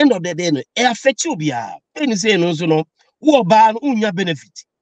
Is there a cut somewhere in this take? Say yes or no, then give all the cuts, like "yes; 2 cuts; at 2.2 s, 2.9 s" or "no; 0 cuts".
yes; 1 cut; at 1.9 s